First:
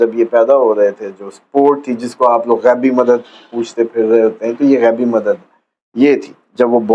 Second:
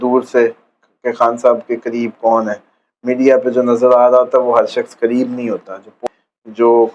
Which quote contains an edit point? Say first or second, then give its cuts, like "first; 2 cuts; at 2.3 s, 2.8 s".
second; 1 cut; at 6.0 s